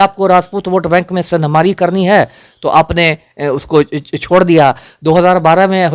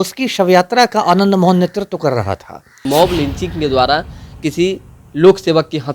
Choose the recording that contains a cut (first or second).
second